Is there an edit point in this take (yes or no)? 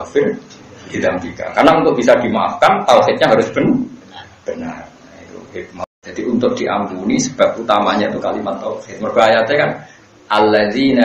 yes